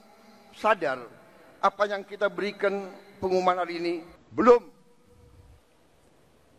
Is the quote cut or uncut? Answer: cut